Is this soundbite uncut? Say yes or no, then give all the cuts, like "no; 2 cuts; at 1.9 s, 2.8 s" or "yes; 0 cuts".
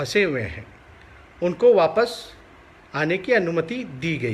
yes; 0 cuts